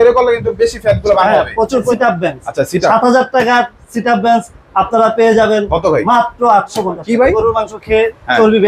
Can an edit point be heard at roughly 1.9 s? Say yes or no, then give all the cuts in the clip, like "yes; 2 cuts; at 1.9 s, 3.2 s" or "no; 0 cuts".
yes; 2 cuts; at 1.9 s, 7.3 s